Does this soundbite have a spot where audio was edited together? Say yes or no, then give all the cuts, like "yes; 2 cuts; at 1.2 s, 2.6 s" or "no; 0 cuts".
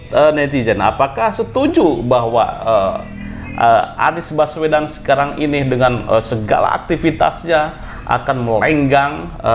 no; 0 cuts